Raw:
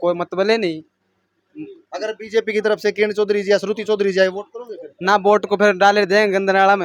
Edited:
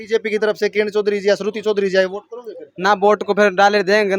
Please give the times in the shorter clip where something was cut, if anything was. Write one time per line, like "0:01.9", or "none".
none